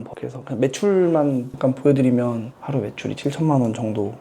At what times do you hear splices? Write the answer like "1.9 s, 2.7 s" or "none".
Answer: 2.6 s